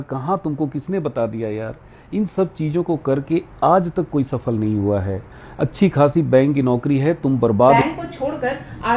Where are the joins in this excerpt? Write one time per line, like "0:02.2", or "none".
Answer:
0:07.8